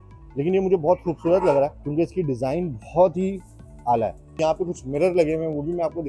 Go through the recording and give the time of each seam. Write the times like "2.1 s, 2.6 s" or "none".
1.8 s, 4.4 s